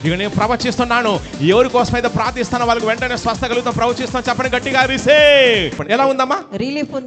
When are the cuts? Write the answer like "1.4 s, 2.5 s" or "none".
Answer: 5.8 s